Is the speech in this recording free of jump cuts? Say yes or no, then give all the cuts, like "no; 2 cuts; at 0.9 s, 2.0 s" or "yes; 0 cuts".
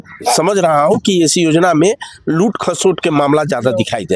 yes; 0 cuts